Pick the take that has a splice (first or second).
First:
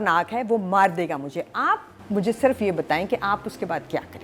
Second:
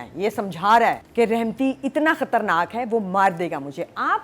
second